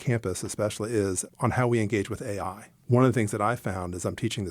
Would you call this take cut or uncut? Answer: cut